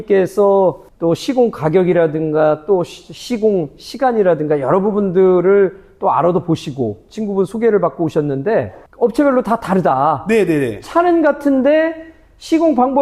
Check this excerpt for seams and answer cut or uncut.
cut